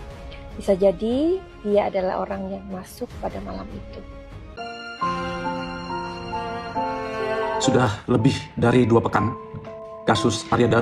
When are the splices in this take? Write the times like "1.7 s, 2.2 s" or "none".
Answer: 4.6 s